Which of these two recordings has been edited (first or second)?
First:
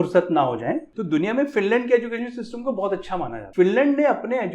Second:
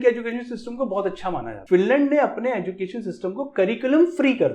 first